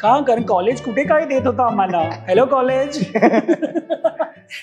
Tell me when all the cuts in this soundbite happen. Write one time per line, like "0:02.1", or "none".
none